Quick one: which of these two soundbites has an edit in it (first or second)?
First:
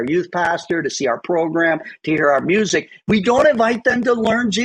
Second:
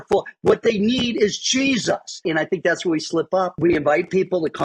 second